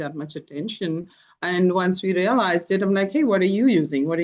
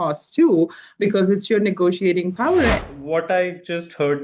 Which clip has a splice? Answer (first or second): second